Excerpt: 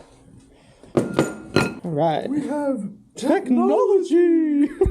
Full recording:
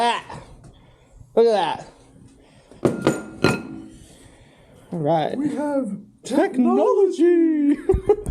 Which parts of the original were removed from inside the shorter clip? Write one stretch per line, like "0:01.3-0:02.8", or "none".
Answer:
0:03.7-0:04.9